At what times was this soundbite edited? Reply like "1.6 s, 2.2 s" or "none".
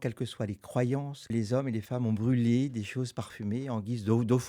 1.3 s